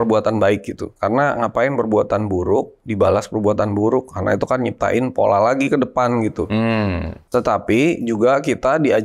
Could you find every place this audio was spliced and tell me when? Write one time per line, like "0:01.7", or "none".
0:07.1